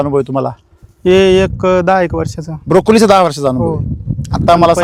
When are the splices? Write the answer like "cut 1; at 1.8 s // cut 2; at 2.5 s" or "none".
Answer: none